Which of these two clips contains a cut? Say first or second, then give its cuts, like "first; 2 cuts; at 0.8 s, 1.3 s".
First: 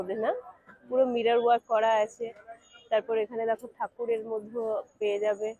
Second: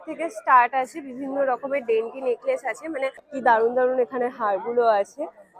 second; 1 cut; at 3.3 s